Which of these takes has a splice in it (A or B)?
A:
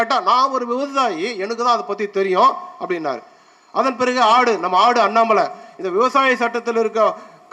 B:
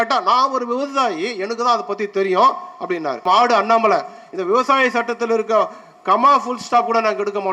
B